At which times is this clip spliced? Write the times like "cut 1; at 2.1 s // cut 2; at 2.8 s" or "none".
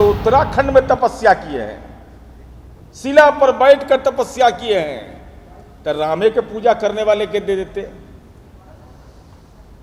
none